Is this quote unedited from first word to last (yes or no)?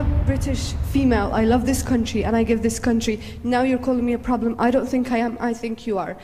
yes